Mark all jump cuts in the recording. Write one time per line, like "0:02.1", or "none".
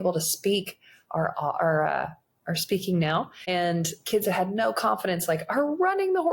0:03.4